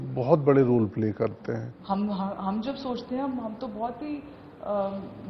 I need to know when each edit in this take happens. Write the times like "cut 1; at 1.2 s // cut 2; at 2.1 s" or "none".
cut 1; at 1.7 s